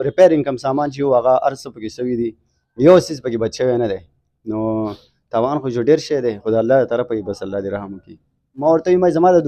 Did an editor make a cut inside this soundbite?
yes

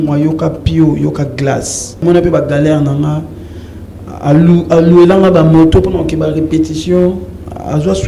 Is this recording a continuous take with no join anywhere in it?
no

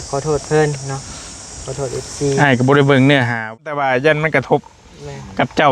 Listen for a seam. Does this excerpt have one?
yes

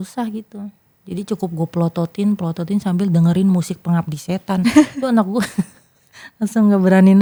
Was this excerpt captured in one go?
yes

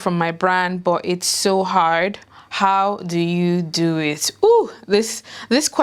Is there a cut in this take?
no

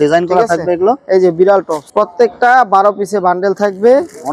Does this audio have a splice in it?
no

